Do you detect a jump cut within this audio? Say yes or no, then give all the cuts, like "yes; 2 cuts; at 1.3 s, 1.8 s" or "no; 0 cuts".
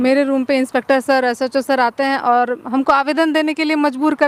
no; 0 cuts